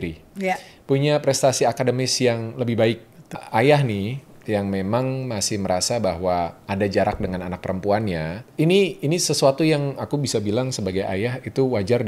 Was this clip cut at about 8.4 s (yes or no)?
yes